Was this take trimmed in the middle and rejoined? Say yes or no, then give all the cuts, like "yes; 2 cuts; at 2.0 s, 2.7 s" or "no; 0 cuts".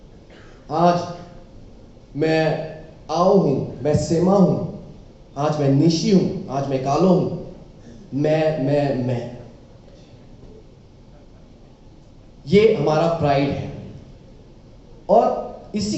no; 0 cuts